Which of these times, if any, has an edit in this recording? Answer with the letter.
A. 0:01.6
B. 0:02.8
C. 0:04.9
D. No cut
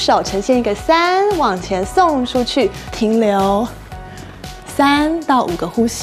D